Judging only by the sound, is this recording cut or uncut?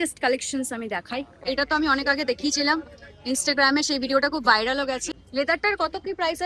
cut